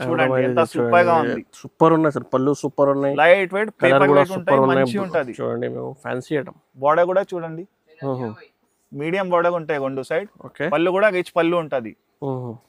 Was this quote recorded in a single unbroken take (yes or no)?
yes